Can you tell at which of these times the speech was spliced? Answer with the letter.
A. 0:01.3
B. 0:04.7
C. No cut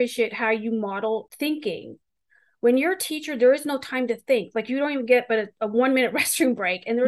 A